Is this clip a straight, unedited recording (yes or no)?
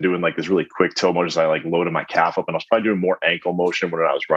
yes